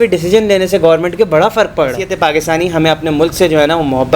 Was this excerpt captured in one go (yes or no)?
no